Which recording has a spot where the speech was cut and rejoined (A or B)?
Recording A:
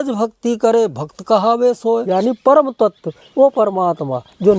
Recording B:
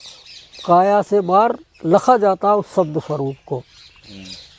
A